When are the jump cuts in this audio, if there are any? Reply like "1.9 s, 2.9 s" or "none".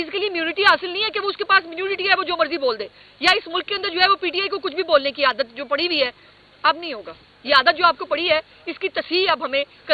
none